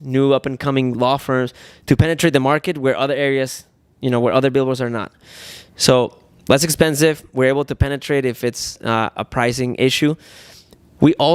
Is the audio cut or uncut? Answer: uncut